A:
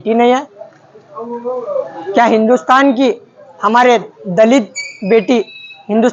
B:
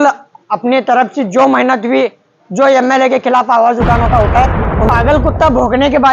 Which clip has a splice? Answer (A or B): B